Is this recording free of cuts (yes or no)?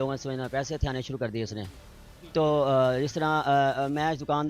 yes